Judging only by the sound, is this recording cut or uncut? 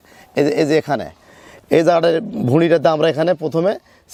uncut